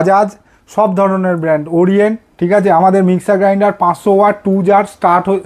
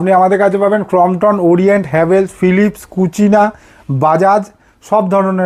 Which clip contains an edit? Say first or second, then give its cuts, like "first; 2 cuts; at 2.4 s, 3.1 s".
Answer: first; 1 cut; at 2.3 s